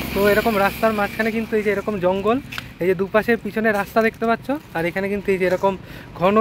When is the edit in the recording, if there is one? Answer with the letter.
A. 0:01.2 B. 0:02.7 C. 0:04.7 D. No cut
D